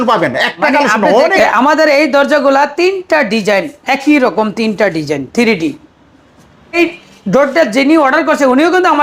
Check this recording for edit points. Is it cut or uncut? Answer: cut